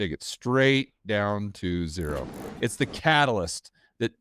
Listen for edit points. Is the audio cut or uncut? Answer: cut